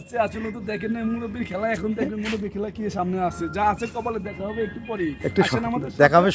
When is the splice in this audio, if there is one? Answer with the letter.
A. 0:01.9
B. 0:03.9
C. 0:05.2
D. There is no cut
D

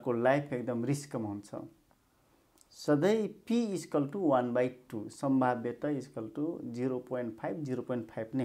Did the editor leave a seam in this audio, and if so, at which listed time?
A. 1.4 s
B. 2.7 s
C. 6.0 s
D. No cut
D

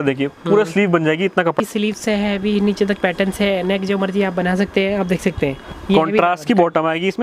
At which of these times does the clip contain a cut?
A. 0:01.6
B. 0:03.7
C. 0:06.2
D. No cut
A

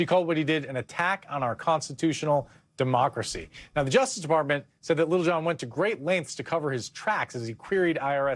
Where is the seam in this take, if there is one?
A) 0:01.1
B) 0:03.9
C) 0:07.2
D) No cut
C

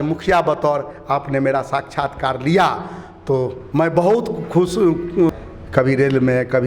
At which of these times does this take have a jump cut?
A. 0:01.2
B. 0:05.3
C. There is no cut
B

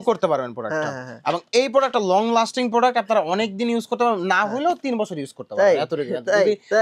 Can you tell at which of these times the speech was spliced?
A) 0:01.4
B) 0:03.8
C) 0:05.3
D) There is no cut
D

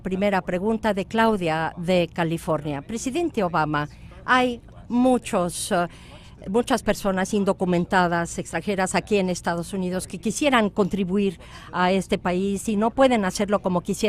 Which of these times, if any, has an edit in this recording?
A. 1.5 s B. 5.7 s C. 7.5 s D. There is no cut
D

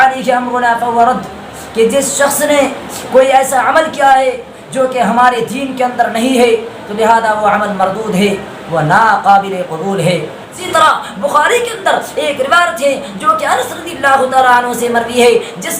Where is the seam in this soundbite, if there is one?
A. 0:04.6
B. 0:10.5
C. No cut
B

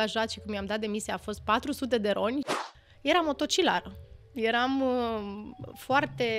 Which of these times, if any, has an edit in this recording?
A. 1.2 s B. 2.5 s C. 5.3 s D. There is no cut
B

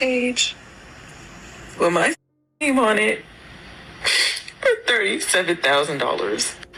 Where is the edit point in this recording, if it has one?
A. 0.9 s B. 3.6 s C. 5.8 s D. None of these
D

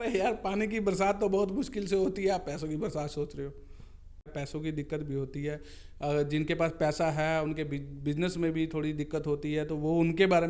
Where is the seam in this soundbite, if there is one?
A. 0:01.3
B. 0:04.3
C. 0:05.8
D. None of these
B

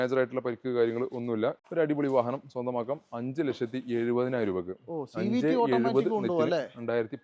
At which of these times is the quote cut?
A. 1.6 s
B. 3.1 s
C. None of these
A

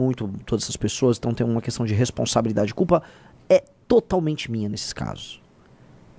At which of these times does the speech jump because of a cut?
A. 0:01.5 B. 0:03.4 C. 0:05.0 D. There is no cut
D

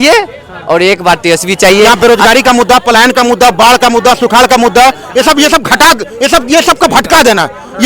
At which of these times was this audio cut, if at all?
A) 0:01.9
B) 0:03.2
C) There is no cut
A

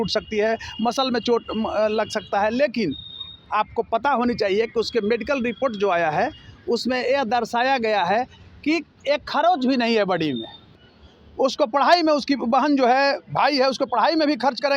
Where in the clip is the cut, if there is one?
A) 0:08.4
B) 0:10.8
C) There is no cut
B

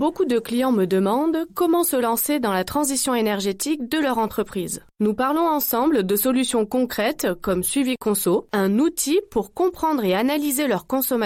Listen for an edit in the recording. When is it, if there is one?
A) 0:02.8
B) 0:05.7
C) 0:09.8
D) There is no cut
D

